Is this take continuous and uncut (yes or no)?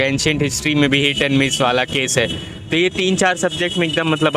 yes